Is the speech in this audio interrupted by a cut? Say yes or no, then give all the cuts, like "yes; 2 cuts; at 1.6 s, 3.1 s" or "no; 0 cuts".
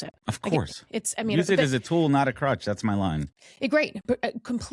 no; 0 cuts